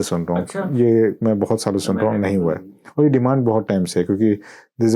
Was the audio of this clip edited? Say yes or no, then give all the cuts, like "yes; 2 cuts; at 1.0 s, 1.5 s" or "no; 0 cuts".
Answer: no; 0 cuts